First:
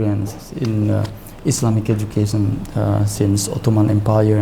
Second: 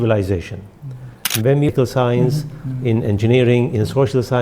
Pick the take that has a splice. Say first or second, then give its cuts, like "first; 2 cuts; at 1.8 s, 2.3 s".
second; 1 cut; at 1.7 s